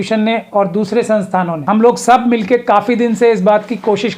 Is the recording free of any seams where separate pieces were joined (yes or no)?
no